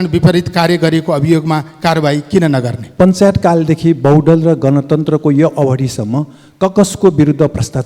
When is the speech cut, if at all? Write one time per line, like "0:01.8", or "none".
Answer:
0:02.9